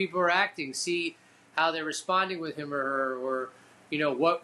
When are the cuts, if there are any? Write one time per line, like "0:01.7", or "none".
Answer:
none